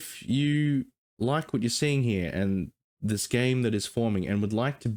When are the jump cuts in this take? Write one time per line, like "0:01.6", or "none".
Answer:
none

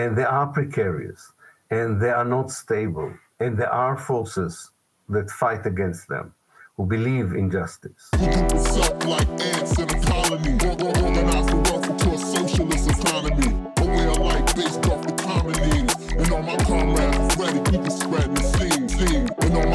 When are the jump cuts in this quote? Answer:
0:08.1

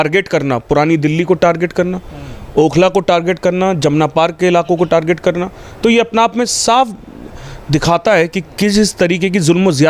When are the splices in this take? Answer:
none

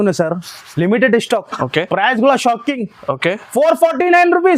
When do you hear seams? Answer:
none

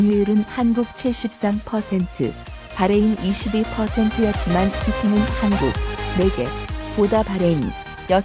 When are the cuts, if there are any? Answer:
none

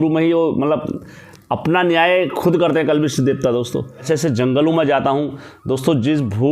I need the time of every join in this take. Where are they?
0:04.0

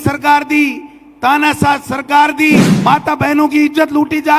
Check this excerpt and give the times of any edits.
0:02.7

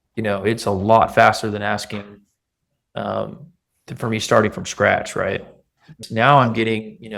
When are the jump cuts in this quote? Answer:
0:06.0

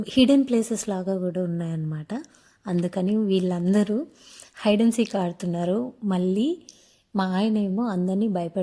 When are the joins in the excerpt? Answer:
none

